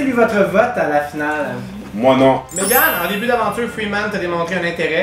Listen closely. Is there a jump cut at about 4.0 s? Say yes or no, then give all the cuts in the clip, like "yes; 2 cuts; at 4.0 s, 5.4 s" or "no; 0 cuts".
no; 1 cut; at 2.4 s